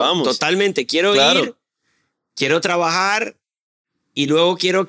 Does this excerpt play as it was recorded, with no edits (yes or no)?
yes